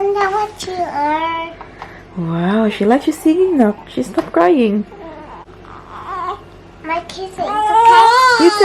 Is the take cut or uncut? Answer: cut